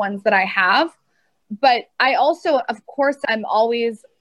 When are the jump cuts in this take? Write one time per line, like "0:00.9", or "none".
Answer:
none